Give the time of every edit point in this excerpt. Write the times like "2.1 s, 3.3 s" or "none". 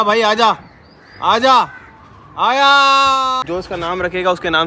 3.4 s